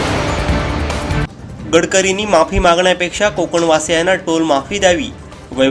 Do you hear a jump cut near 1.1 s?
yes; 1 cut; at 1.1 s

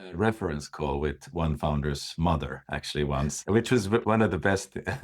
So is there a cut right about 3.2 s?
yes; 1 cut; at 3.2 s

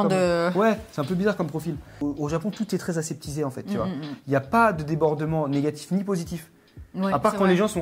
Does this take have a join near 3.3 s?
no; 1 cut; at 1.9 s

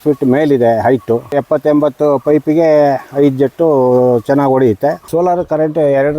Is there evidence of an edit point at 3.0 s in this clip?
no; 2 cuts; at 1.4 s, 5.0 s

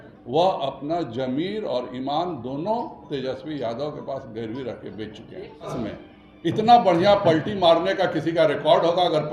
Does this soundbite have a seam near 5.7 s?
yes; 1 cut; at 5.7 s

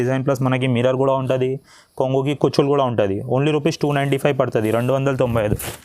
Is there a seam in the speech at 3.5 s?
no; 0 cuts

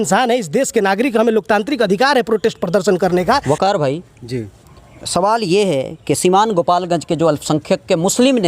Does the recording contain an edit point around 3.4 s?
yes; 1 cut; at 3.4 s

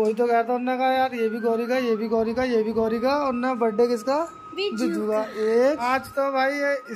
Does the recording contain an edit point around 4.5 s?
no; 1 cut; at 5.8 s

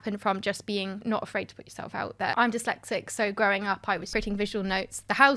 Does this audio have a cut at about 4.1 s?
yes; 3 cuts; at 1.0 s, 2.3 s, 4.1 s

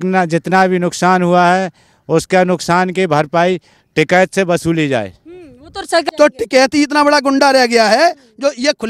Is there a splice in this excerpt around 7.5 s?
no; 1 cut; at 6.0 s

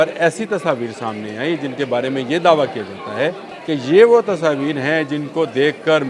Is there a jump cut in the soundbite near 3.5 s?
yes; 1 cut; at 3.5 s

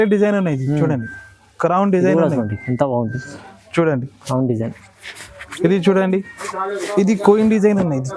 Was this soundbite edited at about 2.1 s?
no; 1 cut; at 6.8 s

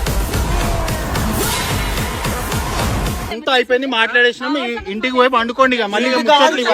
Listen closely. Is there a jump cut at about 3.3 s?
yes; 1 cut; at 3.3 s

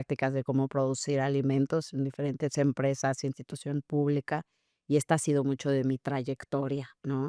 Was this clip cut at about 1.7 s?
no; 0 cuts

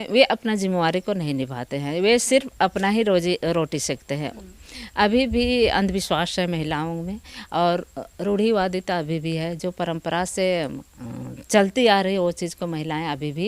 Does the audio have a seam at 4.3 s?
yes; 1 cut; at 4.3 s

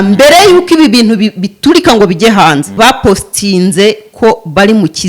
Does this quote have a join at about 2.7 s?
yes; 1 cut; at 2.7 s

